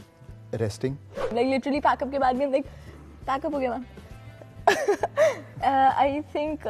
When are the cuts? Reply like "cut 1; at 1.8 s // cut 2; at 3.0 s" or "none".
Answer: cut 1; at 1.3 s